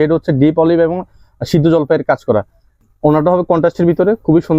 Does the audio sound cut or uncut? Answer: uncut